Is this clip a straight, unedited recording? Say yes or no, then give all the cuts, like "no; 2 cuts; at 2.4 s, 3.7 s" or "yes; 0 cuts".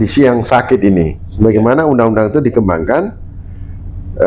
no; 1 cut; at 1.3 s